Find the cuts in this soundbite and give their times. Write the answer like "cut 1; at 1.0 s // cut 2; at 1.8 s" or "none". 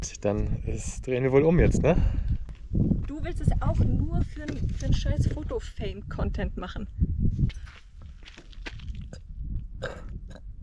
cut 1; at 7.6 s